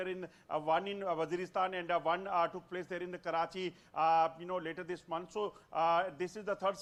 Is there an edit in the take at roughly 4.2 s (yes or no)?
no